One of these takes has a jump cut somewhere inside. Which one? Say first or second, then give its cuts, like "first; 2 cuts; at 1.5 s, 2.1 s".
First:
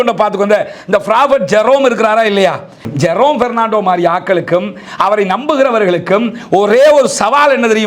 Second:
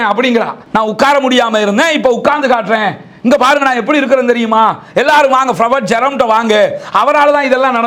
first; 1 cut; at 2.9 s